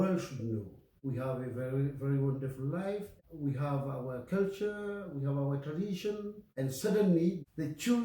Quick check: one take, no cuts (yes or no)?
no